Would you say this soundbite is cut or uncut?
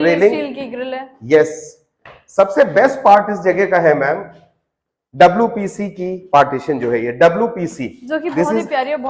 uncut